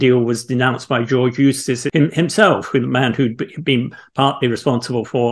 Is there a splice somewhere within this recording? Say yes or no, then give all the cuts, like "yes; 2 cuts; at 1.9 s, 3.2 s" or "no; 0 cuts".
yes; 1 cut; at 1.8 s